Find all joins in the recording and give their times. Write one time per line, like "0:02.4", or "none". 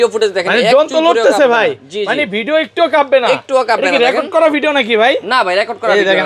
none